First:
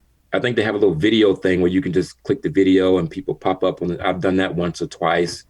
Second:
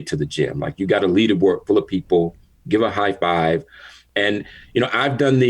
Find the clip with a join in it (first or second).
second